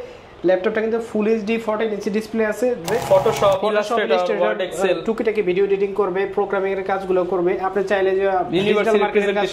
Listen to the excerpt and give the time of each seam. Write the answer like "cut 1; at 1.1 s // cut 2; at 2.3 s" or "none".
cut 1; at 2.9 s

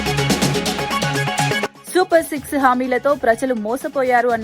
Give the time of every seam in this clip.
cut 1; at 1.8 s

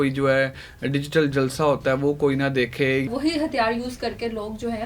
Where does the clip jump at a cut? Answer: cut 1; at 3.1 s

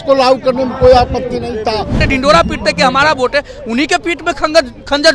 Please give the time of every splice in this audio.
cut 1; at 2.0 s

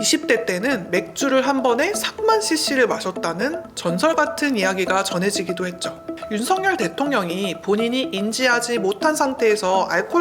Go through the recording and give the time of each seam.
cut 1; at 6.2 s

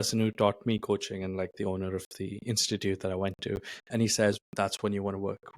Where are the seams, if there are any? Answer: cut 1; at 4.4 s

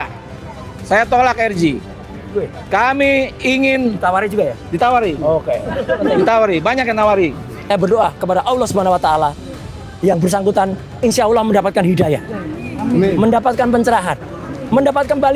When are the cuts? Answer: cut 1; at 7.5 s

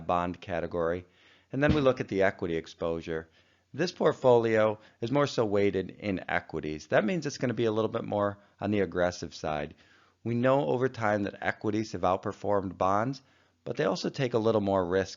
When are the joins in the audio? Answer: cut 1; at 14.1 s

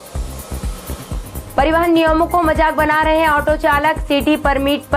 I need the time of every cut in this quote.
cut 1; at 1.1 s

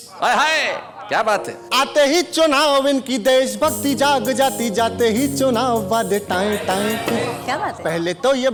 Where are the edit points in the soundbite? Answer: none

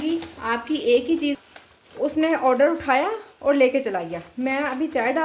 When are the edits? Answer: cut 1; at 1.4 s

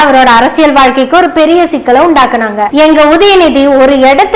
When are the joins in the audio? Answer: cut 1; at 2.7 s

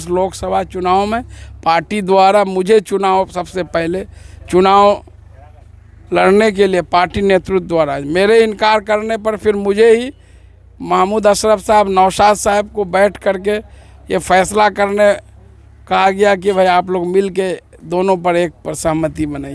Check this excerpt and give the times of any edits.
none

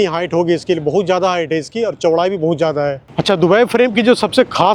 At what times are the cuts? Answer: cut 1; at 3.1 s

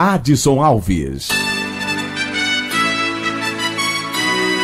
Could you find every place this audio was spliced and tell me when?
cut 1; at 1.3 s

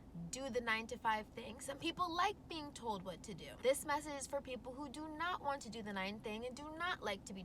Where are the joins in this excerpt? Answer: cut 1; at 3.5 s

